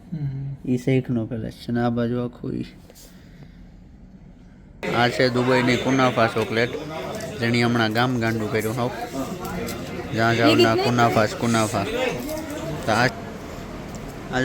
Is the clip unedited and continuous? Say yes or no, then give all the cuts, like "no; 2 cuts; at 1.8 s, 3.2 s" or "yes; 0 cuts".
no; 2 cuts; at 4.8 s, 13.1 s